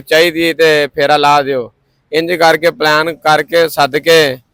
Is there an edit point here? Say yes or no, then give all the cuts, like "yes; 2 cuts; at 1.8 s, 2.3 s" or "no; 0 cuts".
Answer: no; 0 cuts